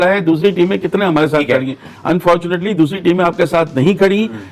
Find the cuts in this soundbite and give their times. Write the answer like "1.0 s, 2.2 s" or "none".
none